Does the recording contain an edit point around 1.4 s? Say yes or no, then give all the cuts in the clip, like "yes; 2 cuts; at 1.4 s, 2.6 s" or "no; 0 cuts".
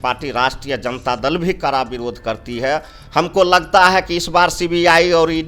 no; 1 cut; at 3.0 s